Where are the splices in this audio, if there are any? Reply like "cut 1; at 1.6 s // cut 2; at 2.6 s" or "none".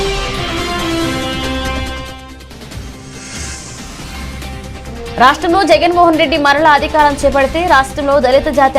none